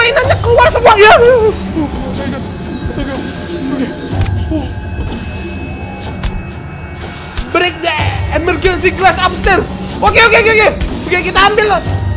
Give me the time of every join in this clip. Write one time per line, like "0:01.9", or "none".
none